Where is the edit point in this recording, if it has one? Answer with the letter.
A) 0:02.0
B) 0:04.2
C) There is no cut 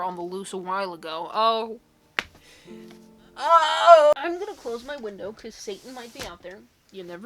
B